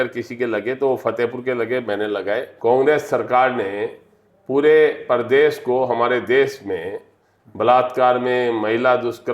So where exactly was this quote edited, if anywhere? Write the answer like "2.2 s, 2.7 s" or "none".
2.5 s